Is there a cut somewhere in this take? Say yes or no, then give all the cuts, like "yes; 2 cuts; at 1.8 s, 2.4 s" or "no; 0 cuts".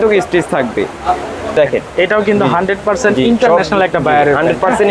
yes; 1 cut; at 1.6 s